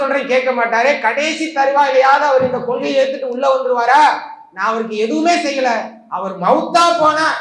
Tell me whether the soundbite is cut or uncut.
uncut